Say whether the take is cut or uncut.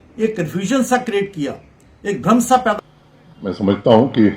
cut